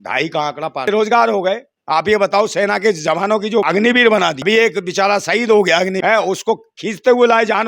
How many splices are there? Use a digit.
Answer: 4